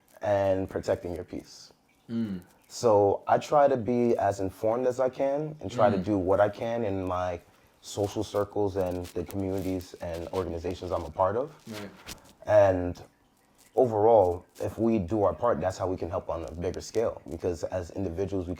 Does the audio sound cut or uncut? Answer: uncut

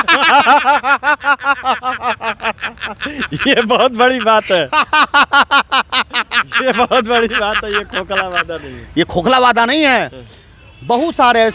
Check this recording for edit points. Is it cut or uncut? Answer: uncut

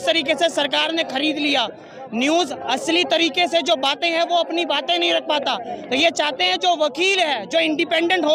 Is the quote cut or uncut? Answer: uncut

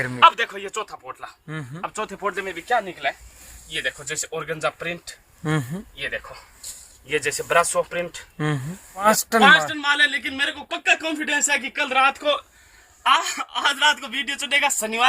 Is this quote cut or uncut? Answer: cut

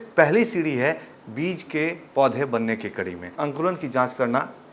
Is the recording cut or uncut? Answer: cut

